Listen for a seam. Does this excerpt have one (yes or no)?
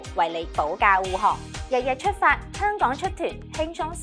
yes